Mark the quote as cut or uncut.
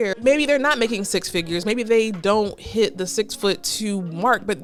uncut